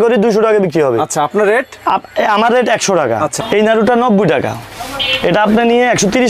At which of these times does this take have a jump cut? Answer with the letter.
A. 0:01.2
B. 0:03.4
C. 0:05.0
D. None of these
B